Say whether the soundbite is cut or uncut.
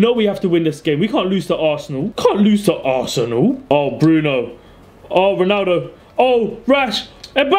cut